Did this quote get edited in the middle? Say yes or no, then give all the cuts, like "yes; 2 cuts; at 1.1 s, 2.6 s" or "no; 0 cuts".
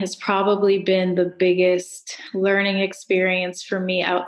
no; 0 cuts